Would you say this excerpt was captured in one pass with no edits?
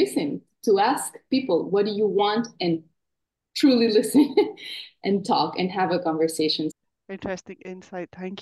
yes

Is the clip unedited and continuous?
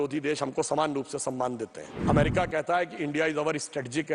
no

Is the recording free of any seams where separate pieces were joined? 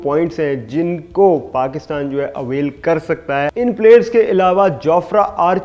no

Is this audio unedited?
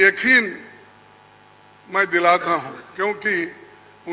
yes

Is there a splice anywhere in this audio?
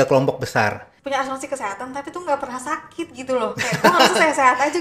yes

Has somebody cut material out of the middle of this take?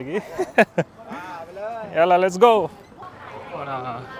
yes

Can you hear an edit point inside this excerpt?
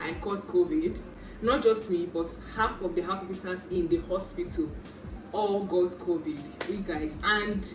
no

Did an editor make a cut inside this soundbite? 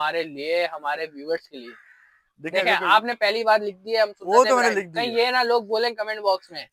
no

